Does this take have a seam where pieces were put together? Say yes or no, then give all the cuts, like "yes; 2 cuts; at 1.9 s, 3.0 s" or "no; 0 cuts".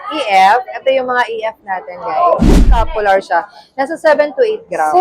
yes; 1 cut; at 2.9 s